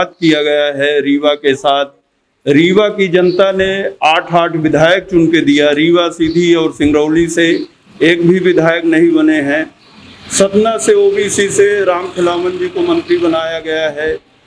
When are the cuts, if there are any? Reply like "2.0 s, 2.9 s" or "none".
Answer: none